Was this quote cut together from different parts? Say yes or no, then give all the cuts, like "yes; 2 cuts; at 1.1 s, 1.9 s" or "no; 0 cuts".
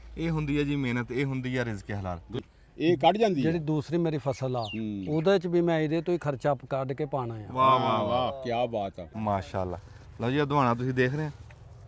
yes; 2 cuts; at 2.5 s, 9.1 s